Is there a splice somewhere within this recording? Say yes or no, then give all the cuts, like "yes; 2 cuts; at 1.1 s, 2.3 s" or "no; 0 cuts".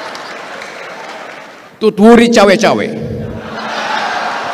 yes; 1 cut; at 1.6 s